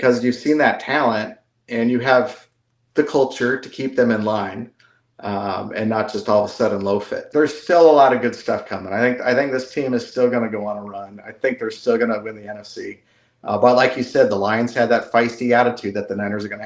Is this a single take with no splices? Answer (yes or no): no